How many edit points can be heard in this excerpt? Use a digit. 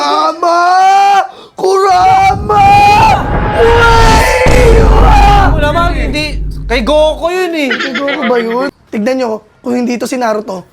1